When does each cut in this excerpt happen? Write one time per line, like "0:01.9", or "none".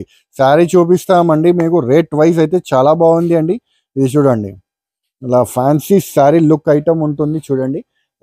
none